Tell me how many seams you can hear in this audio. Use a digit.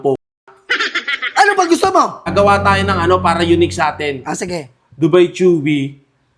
1